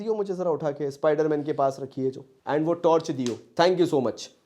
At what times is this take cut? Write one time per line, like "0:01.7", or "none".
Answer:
0:02.3
0:03.4